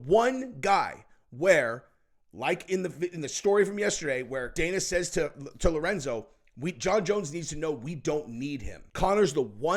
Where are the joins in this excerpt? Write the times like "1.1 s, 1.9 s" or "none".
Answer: 4.5 s, 8.8 s